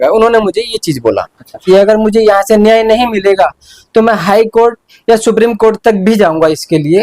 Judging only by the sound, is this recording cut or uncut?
cut